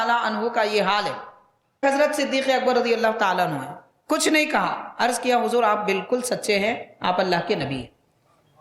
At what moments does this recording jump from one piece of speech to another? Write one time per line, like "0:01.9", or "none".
0:01.8